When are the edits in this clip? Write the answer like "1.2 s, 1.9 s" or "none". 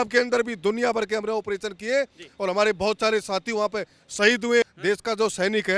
4.7 s

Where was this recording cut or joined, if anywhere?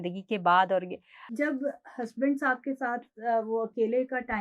1.3 s

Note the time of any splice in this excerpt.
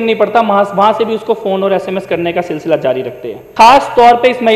3.4 s

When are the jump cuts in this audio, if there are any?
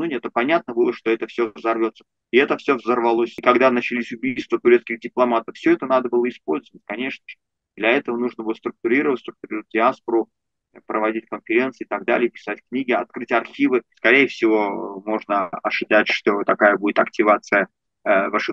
3.3 s, 13.9 s

